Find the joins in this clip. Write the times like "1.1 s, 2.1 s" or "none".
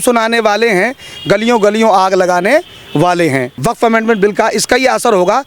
3.5 s